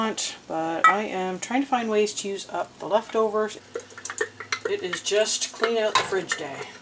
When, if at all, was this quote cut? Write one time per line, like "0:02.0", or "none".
0:03.6